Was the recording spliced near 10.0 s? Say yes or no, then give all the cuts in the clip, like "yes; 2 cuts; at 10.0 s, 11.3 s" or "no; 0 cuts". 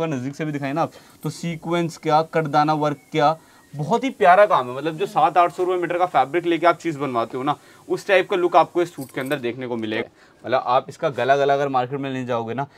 yes; 1 cut; at 10.0 s